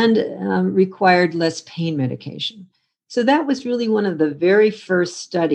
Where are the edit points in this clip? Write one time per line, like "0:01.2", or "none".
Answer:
none